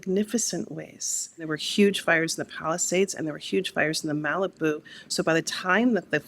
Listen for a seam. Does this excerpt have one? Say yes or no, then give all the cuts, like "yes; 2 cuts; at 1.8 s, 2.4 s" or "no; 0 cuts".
yes; 1 cut; at 1.5 s